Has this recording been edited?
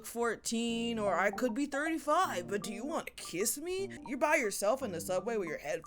yes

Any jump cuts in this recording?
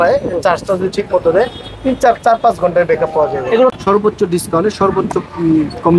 yes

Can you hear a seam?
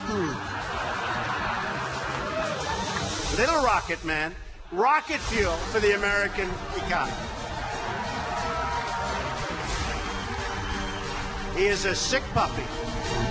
yes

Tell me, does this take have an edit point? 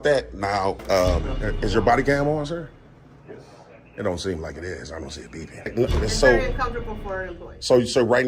yes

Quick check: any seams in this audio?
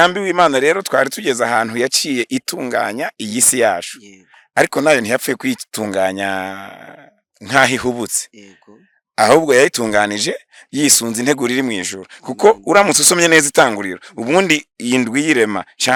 no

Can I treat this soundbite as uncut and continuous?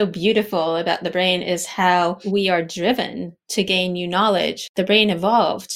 no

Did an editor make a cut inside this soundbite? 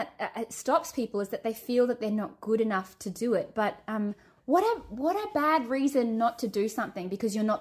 no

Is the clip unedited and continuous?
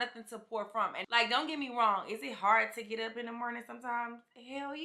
no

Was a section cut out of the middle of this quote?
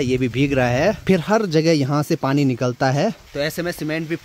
yes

